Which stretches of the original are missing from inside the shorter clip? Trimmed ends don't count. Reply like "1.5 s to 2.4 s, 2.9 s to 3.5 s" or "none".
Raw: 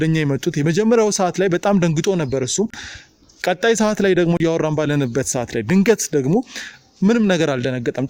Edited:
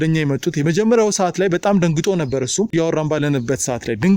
2.7 s to 4.4 s

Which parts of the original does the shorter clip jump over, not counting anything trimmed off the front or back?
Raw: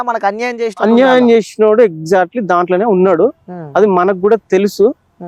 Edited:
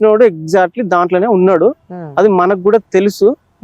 none

